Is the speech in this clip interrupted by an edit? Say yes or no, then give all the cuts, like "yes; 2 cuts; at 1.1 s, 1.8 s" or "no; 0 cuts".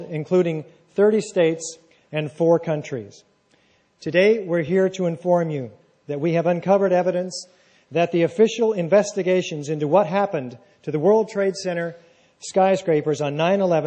no; 0 cuts